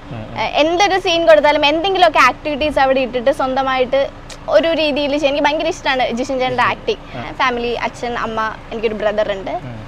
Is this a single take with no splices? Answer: no; 1 cut; at 7.2 s

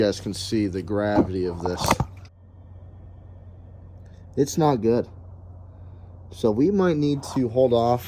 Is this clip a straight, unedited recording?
yes; 0 cuts

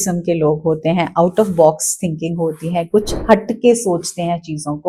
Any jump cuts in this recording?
no; 0 cuts

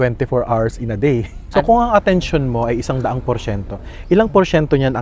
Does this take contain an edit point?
yes; 1 cut; at 1.4 s

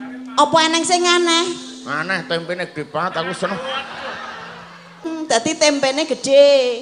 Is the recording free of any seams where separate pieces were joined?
no; 1 cut; at 5.0 s

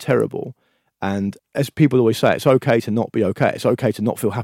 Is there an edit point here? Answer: yes; 1 cut; at 1.4 s

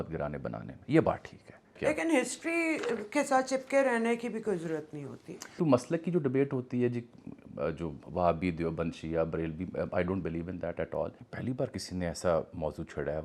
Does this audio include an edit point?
yes; 3 cuts; at 1.8 s, 5.6 s, 11.2 s

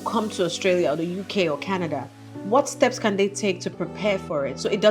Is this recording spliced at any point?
no; 0 cuts

